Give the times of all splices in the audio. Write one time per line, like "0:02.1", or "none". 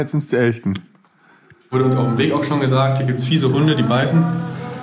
0:01.7